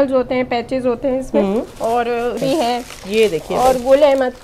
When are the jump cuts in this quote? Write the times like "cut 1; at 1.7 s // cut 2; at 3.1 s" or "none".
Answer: cut 1; at 2.4 s